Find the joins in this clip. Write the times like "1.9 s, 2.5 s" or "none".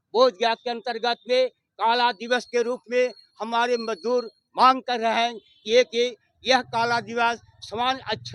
none